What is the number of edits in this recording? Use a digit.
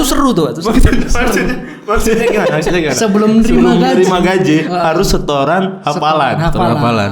0